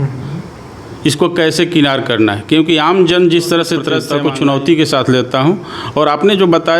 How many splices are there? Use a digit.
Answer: 1